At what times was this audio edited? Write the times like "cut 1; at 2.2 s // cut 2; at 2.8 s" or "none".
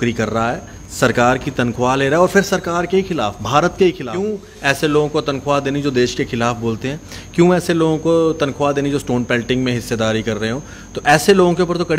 cut 1; at 4.5 s